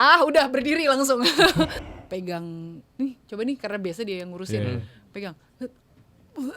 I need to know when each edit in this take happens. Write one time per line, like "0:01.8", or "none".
0:01.8